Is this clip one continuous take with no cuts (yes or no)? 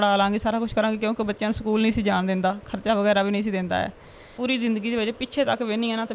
no